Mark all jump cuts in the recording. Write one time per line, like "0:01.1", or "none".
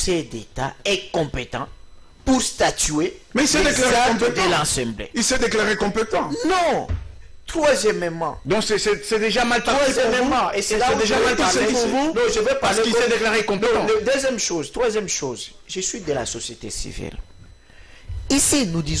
none